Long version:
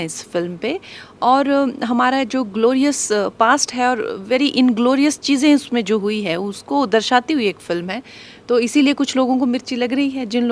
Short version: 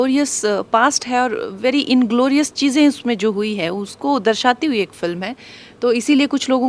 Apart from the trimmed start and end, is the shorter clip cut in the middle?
no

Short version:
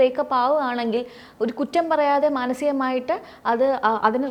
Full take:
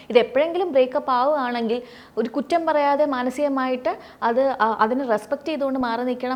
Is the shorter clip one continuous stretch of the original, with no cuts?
yes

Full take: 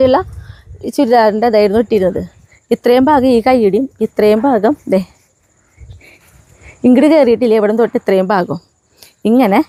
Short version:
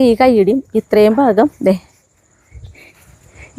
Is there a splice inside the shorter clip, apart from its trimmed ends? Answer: no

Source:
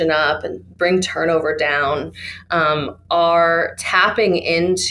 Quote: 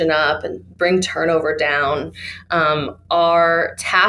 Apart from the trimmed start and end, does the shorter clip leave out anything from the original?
no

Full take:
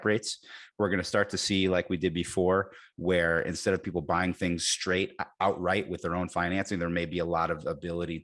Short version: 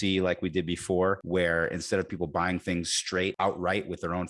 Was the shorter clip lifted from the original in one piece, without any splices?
no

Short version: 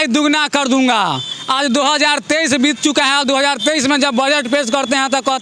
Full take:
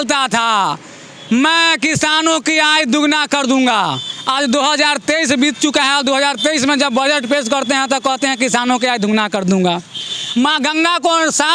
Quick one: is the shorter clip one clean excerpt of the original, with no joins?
yes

